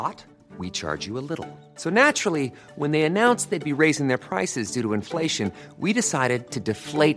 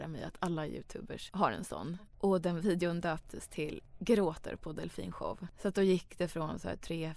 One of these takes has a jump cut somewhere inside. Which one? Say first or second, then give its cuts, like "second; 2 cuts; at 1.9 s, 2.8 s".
second; 4 cuts; at 1.2 s, 1.9 s, 3.9 s, 5.5 s